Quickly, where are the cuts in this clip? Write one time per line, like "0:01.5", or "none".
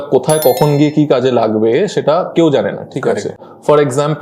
none

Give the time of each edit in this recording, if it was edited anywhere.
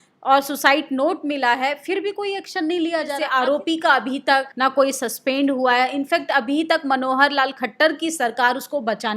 0:03.2
0:04.5

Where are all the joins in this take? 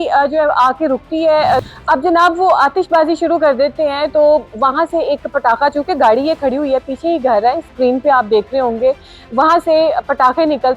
0:01.6

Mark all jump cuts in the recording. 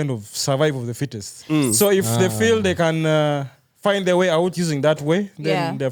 none

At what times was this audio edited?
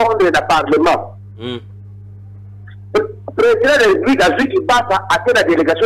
none

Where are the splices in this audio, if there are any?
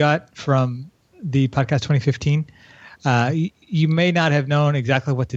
none

